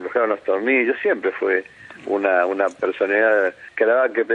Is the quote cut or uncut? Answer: uncut